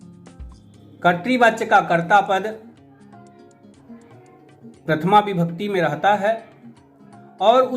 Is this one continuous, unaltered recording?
no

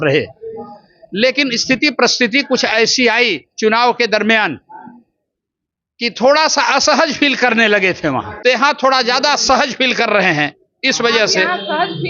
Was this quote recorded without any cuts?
no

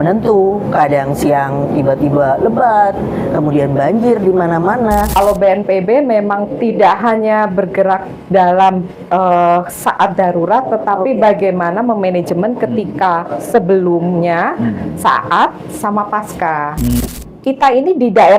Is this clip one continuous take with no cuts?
no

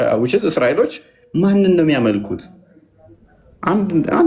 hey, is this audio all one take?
yes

